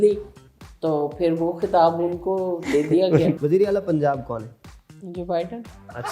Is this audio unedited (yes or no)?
no